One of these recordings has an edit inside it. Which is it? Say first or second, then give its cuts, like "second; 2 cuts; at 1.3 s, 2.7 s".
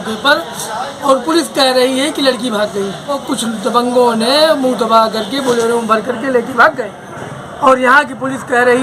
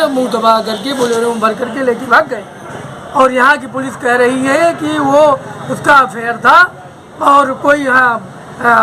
first; 1 cut; at 3.2 s